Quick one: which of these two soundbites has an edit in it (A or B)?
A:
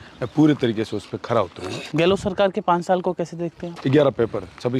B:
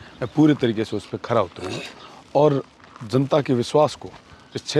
A